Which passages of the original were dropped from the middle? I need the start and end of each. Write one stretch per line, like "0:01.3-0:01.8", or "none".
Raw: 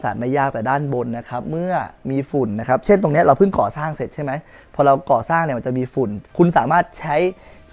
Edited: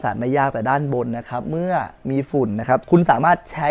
0:02.8-0:06.3